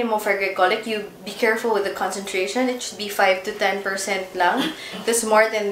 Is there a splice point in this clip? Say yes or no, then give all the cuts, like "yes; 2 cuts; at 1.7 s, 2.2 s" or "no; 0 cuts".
no; 0 cuts